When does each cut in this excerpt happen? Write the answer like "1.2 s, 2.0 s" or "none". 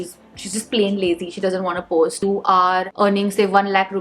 2.2 s